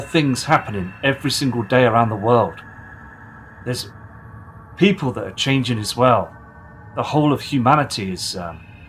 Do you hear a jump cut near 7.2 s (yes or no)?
yes